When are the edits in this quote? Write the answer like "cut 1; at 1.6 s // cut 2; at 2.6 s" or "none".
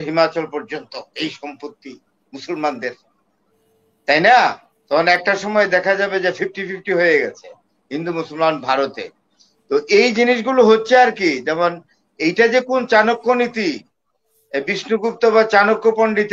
cut 1; at 4.7 s